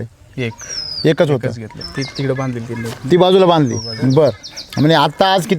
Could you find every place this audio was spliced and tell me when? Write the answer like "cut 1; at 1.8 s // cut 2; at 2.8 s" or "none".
cut 1; at 1.8 s